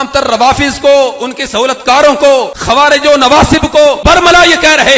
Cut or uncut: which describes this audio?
cut